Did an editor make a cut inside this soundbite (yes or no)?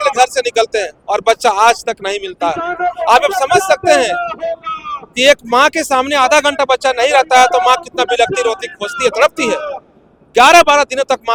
no